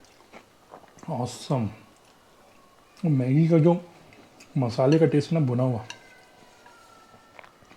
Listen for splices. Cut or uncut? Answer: uncut